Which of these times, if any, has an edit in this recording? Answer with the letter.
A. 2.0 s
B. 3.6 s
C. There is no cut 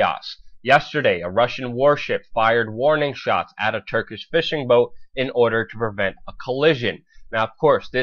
A